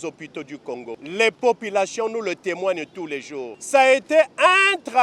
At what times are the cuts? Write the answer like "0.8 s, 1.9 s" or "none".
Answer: 1.0 s, 3.5 s